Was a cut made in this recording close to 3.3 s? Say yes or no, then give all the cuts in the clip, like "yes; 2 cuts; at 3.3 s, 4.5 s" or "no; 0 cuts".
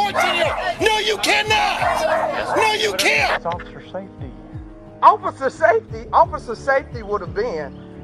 yes; 1 cut; at 3.3 s